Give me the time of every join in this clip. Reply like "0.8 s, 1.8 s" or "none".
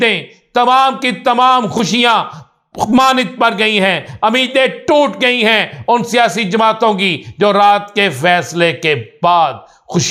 none